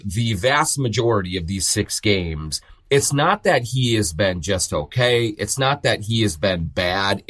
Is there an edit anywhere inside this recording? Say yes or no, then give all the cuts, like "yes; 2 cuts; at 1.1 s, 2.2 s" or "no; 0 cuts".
no; 0 cuts